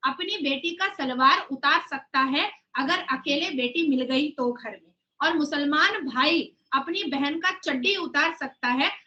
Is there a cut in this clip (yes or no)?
no